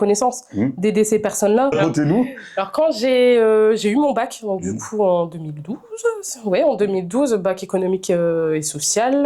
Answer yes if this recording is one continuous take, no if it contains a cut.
no